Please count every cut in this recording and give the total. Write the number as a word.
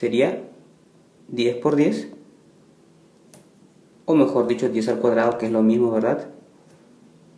one